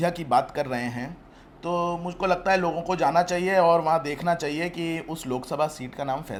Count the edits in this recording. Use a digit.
0